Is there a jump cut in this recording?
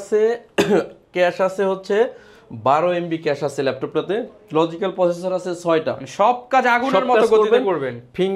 no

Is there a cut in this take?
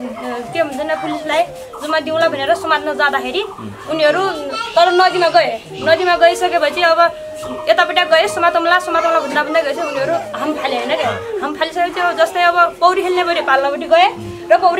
no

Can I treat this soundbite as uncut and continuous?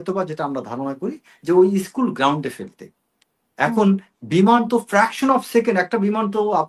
yes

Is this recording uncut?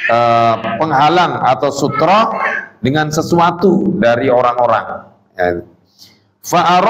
yes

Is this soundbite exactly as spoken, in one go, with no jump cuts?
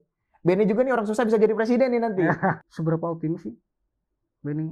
no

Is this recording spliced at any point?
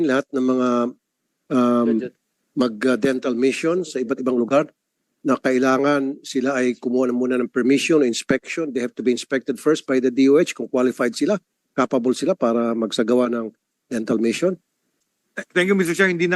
no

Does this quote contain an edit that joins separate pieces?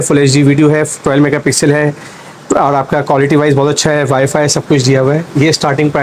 no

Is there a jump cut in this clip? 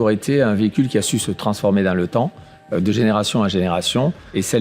no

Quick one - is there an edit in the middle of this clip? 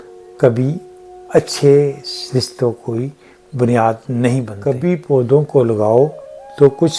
yes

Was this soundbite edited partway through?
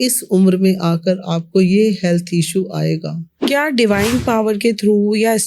yes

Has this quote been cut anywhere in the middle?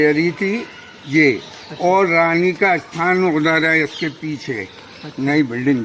no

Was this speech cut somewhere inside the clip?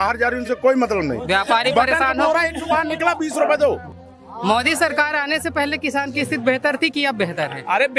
yes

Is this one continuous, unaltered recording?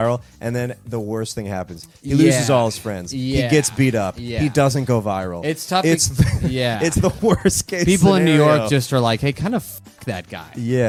yes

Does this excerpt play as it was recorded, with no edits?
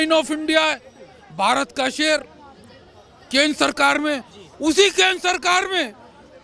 yes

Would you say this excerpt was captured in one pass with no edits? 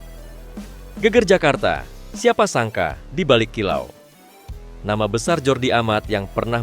no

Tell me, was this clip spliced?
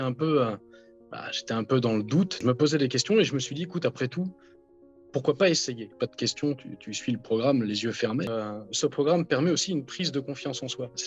yes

